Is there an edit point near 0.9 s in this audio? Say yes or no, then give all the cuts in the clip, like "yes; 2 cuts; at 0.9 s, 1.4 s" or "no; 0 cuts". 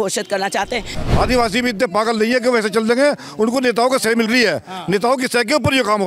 yes; 1 cut; at 0.9 s